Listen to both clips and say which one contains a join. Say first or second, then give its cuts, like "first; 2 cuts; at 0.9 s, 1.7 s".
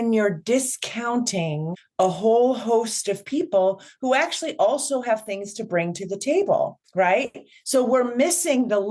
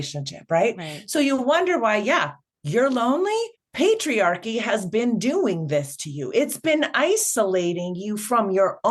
first; 1 cut; at 1.8 s